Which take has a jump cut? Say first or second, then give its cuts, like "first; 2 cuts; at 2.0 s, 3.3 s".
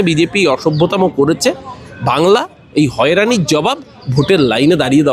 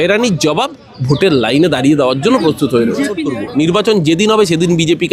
second; 1 cut; at 3.2 s